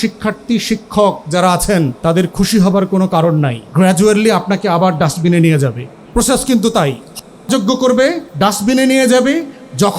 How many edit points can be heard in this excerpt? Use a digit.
4